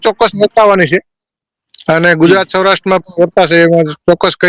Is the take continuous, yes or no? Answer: yes